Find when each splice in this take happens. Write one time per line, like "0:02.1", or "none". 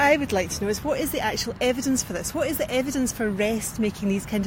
none